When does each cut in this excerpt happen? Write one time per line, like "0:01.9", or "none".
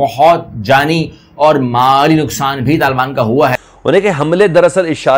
0:03.6